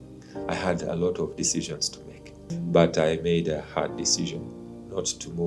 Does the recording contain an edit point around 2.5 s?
yes; 1 cut; at 2.5 s

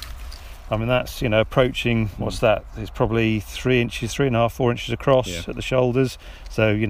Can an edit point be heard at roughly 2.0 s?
no; 0 cuts

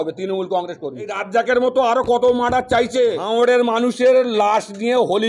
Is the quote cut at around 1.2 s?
yes; 2 cuts; at 1.2 s, 3.2 s

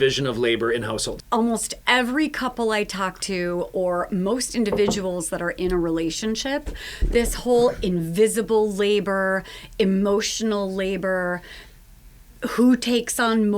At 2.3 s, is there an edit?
no; 1 cut; at 1.1 s

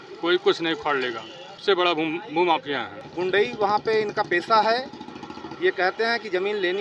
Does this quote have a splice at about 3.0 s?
yes; 2 cuts; at 1.6 s, 3.0 s

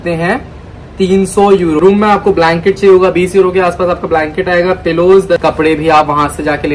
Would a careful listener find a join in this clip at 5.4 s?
yes; 2 cuts; at 1.8 s, 5.4 s

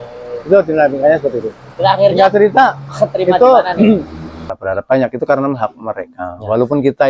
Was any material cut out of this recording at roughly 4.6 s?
yes; 1 cut; at 4.6 s

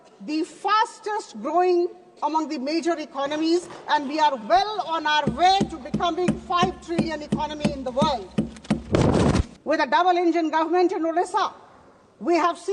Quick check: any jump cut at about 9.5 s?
yes; 1 cut; at 9.5 s

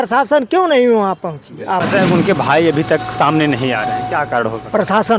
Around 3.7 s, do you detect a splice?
no; 1 cut; at 1.8 s

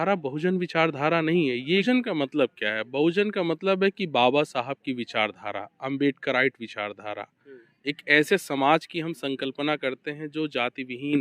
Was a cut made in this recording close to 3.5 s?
no; 1 cut; at 1.8 s

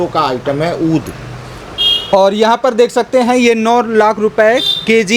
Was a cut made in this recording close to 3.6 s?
no; 0 cuts

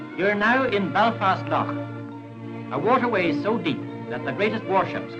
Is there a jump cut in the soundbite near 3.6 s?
no; 1 cut; at 1.9 s

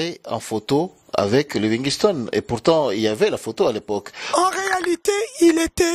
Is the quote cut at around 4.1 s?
yes; 1 cut; at 4.1 s

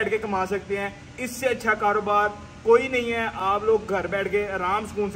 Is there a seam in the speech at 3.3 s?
no; 0 cuts

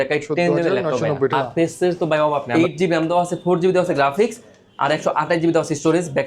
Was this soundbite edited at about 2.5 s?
yes; 2 cuts; at 1.3 s, 2.5 s

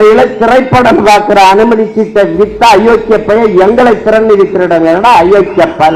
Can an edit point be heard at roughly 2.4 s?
no; 0 cuts

